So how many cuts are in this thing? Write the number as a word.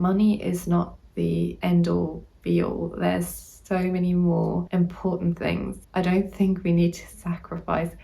three